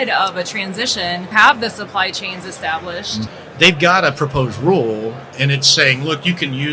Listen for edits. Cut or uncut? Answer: cut